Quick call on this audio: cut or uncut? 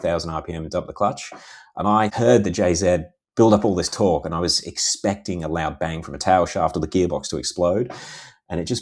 cut